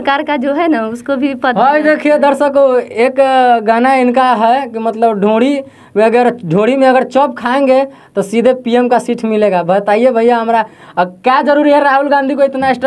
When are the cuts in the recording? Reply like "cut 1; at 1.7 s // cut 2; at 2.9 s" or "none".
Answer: none